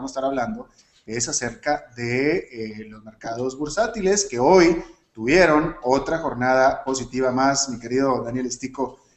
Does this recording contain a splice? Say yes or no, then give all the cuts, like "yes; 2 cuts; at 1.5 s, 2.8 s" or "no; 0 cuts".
yes; 1 cut; at 2.5 s